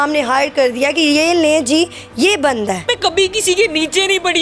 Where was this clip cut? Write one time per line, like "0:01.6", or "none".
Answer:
0:02.9